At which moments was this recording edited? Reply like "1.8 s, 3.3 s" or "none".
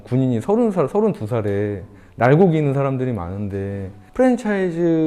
4.0 s